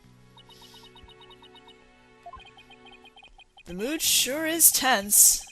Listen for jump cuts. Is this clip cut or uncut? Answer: cut